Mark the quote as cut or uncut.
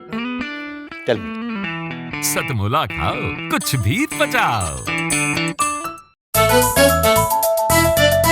cut